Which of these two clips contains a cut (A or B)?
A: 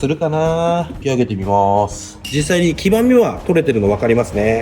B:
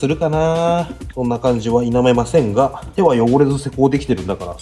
A